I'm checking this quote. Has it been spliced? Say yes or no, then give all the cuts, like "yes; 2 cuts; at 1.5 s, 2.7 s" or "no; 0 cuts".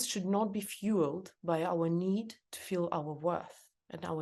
no; 0 cuts